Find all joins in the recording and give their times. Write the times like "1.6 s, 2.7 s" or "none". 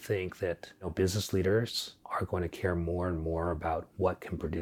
0.9 s, 1.9 s